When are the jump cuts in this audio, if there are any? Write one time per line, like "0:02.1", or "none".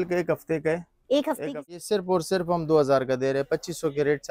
0:01.4